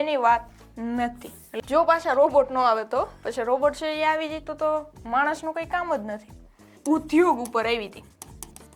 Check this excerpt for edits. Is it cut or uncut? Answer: cut